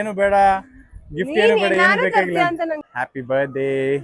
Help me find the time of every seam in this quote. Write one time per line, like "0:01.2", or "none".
0:02.8